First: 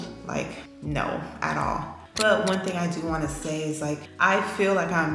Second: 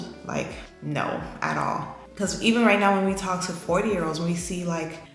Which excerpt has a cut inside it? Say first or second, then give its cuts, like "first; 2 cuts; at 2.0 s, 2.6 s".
first; 1 cut; at 2.0 s